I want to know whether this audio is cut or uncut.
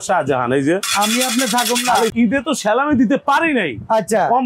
cut